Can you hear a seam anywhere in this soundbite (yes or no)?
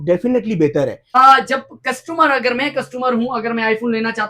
yes